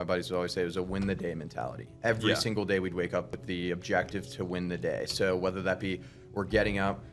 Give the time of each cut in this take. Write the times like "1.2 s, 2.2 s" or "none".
3.3 s

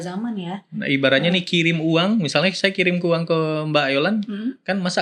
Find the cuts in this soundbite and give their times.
none

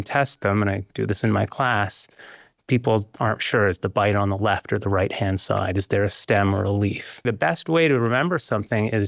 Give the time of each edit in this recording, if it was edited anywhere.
7.2 s

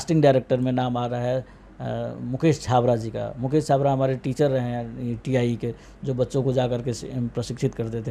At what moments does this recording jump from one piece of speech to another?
none

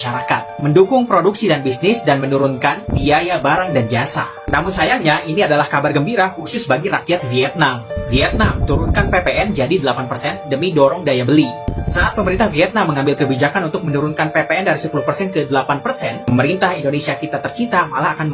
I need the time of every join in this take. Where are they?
none

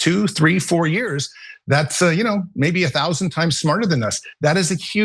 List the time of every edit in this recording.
none

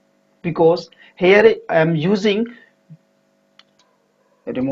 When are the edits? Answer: 3.6 s

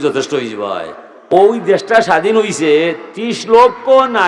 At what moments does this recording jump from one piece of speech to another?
1.1 s

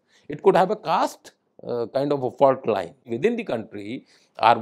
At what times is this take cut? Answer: 3.1 s

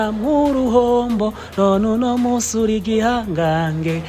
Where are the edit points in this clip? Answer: none

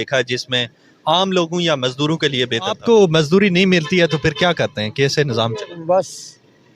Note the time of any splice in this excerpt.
2.8 s

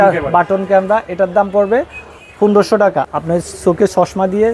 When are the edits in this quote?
3.1 s

